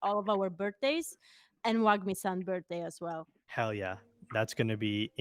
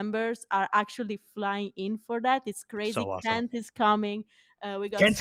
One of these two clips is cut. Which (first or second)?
first